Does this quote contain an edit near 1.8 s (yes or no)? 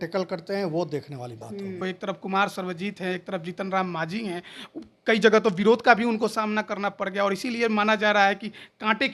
yes